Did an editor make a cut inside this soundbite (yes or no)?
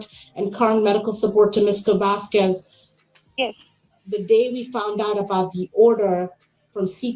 no